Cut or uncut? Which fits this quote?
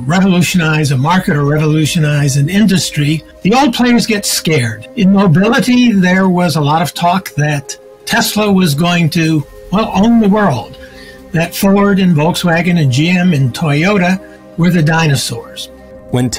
uncut